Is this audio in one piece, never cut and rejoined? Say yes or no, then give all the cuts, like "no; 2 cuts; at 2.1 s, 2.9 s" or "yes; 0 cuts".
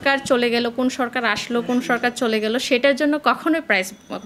yes; 0 cuts